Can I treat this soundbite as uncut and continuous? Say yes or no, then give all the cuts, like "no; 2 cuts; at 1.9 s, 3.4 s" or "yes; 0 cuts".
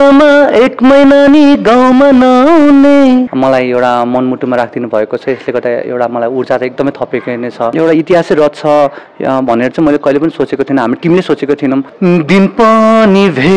no; 3 cuts; at 3.3 s, 7.7 s, 11.9 s